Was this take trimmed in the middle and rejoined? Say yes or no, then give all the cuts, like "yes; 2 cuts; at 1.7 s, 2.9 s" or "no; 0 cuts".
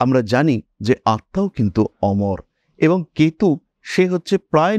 no; 0 cuts